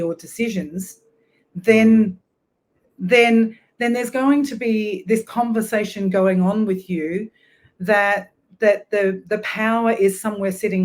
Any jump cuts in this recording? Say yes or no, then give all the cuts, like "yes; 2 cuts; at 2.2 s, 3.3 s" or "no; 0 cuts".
no; 0 cuts